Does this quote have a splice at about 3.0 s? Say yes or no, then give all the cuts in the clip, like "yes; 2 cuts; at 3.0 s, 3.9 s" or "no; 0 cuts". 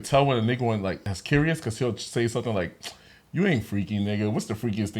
no; 1 cut; at 1.1 s